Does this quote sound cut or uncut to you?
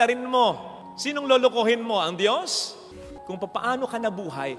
cut